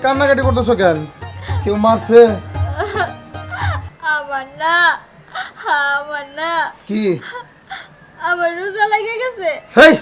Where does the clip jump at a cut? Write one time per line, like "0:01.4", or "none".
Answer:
none